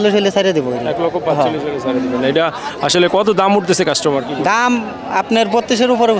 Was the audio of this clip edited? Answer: no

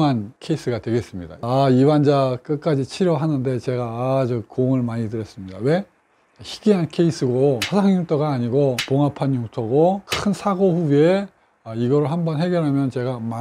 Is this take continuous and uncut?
no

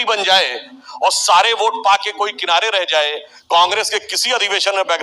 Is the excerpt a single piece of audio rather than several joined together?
no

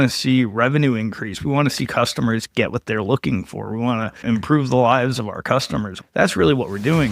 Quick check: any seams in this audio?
yes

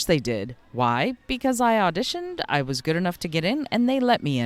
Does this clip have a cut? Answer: no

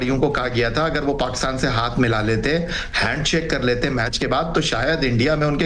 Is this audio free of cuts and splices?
yes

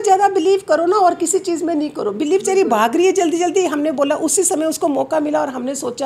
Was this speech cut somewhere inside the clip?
no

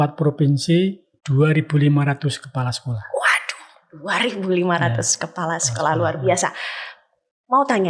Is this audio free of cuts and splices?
yes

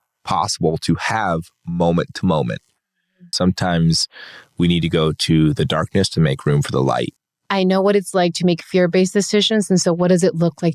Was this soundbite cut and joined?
yes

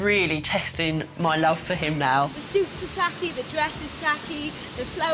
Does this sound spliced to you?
yes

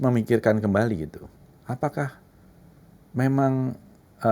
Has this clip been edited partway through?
no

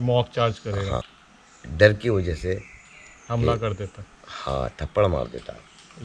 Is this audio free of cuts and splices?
no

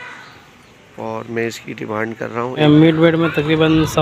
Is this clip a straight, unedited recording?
no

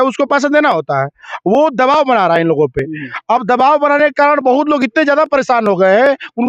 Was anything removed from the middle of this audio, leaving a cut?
no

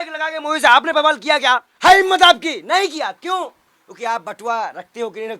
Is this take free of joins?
no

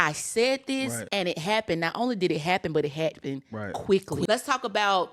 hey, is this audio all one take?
no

